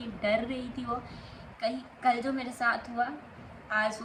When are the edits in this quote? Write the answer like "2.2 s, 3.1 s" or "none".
none

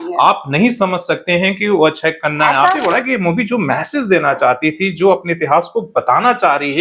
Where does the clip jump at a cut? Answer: 2.8 s

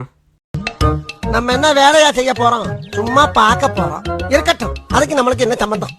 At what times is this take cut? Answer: none

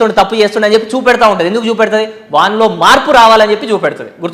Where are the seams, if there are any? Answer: none

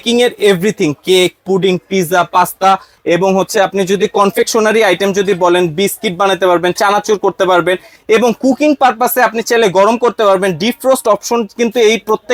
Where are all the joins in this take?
none

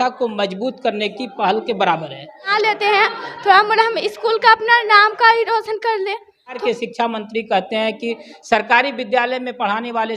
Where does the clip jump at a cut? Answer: 2.5 s, 6.6 s

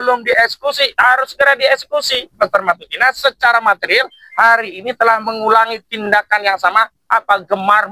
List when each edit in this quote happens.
2.3 s

